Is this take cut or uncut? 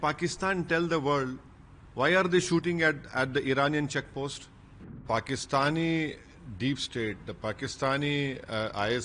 cut